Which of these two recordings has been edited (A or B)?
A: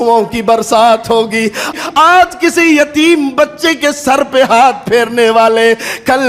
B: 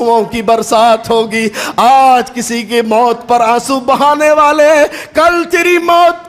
A